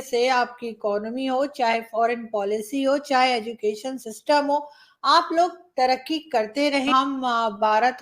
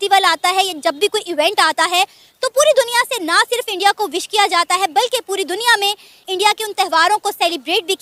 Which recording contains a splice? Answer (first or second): first